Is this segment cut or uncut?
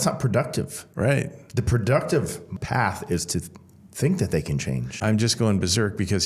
cut